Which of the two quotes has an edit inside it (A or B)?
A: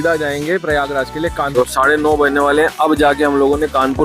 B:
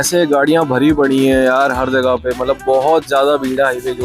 A